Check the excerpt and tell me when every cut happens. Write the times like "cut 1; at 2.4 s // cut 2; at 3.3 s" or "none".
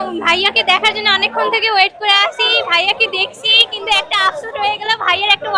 none